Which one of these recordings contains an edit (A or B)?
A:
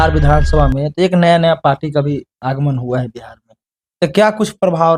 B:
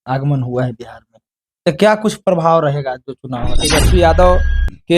B